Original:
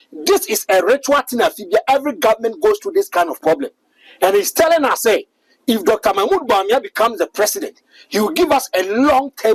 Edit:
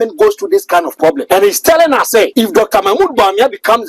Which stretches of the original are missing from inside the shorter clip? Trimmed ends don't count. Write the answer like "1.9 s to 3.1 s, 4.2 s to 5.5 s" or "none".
3.6 s to 4.1 s, 5.2 s to 5.6 s